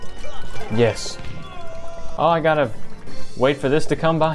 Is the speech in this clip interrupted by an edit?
no; 0 cuts

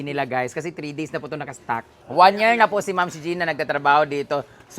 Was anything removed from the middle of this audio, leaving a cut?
yes; 1 cut; at 1.9 s

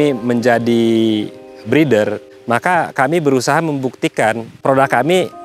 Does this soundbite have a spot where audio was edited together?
yes; 2 cuts; at 2.3 s, 4.5 s

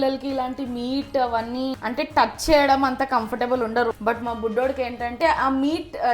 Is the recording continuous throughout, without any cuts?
no; 3 cuts; at 1.8 s, 3.9 s, 5.2 s

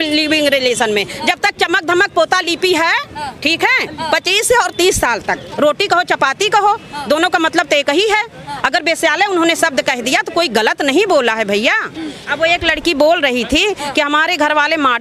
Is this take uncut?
no; 2 cuts; at 5.5 s, 12.2 s

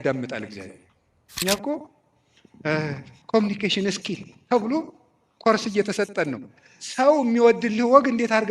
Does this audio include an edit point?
yes; 1 cut; at 1.3 s

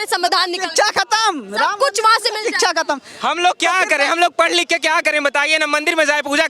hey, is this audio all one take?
yes; 0 cuts

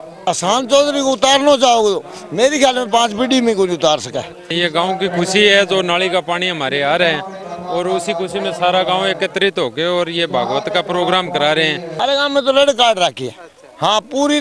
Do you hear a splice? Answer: yes; 2 cuts; at 4.5 s, 11.9 s

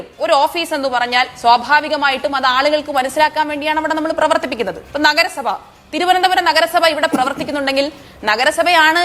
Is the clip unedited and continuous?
no; 1 cut; at 4.9 s

